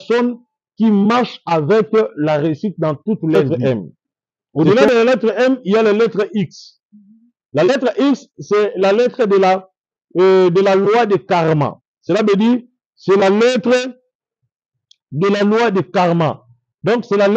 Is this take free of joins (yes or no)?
no